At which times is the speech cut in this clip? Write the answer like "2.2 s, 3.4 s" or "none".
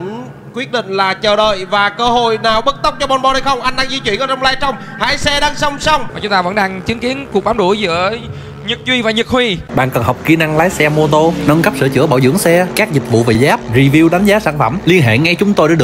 6.1 s, 9.7 s